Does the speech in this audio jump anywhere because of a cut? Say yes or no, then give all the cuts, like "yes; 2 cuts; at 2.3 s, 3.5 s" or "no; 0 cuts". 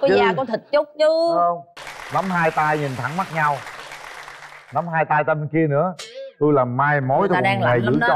yes; 1 cut; at 1.7 s